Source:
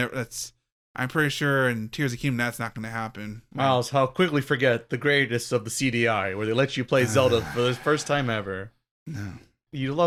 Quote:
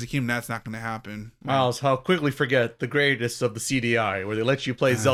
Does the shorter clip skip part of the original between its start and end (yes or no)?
no